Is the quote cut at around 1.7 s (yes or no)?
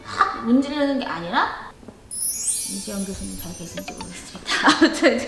yes